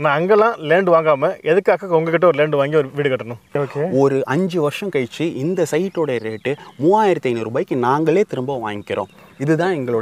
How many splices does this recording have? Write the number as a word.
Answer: one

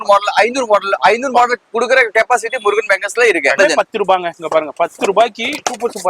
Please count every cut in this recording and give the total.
one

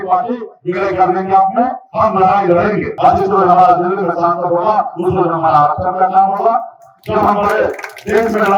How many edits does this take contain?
one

